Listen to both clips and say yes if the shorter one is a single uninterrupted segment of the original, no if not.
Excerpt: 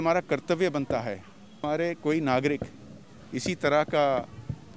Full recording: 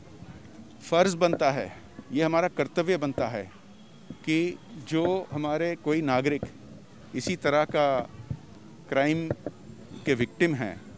no